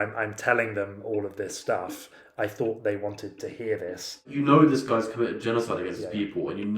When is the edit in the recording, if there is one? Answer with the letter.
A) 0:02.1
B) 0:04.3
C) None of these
B